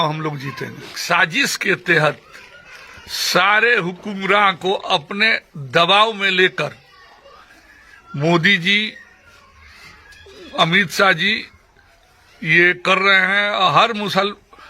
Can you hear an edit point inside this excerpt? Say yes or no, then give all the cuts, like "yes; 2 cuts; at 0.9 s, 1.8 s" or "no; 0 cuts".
yes; 1 cut; at 0.9 s